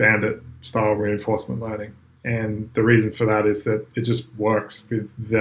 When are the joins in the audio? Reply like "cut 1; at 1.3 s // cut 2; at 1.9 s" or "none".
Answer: none